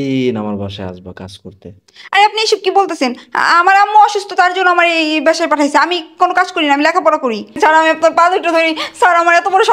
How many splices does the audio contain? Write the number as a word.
one